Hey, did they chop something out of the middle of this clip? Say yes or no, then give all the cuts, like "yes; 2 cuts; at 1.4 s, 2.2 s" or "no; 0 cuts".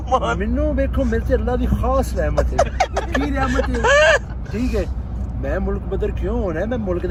no; 0 cuts